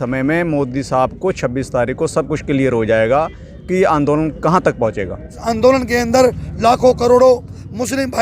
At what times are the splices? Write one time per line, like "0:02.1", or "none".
0:05.4